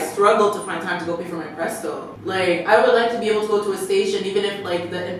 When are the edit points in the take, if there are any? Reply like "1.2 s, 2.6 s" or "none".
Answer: 2.1 s